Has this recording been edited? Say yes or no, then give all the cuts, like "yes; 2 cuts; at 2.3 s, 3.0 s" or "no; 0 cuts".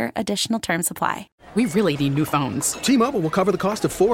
yes; 1 cut; at 1.3 s